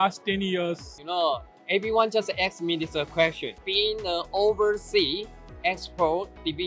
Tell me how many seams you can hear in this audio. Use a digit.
2